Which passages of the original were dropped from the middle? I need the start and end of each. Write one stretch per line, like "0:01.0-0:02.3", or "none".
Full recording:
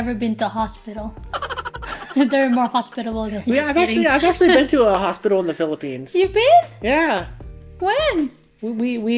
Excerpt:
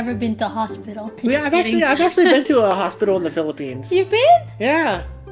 0:01.1-0:03.4